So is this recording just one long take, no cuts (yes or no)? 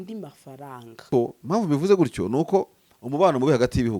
no